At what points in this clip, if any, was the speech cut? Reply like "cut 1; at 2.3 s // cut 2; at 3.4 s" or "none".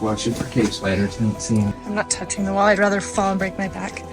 cut 1; at 1.7 s